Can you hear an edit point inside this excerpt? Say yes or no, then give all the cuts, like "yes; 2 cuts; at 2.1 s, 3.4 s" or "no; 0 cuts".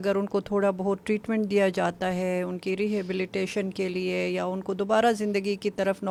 no; 0 cuts